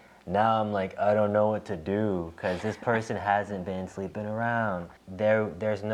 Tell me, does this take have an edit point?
yes; 1 cut; at 5.0 s

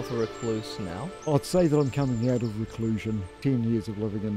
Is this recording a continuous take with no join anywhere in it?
no; 2 cuts; at 1.3 s, 3.3 s

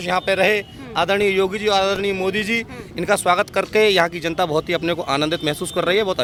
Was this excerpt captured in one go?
yes; 0 cuts

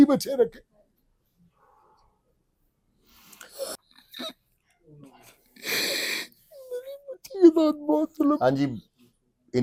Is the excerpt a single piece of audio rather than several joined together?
yes; 0 cuts

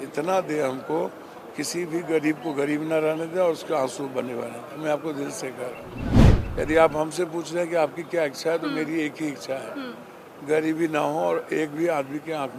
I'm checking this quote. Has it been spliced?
no; 0 cuts

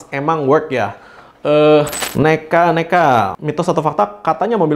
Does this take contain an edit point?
yes; 1 cut; at 2.0 s

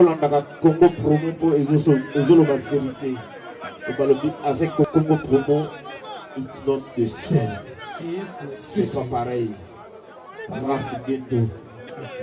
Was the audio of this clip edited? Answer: no; 0 cuts

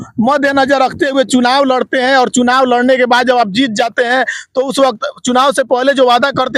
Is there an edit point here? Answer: no; 0 cuts

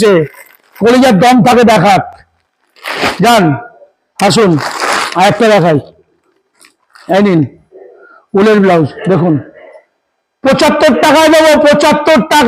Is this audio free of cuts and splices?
yes; 0 cuts

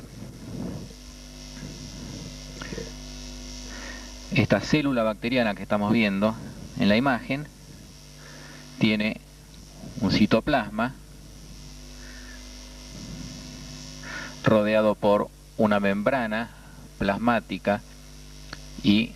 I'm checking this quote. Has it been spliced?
yes; 1 cut; at 5.8 s

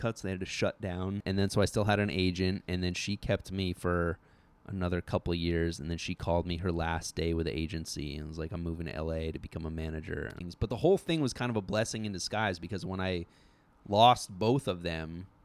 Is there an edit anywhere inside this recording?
yes; 2 cuts; at 1.2 s, 10.4 s

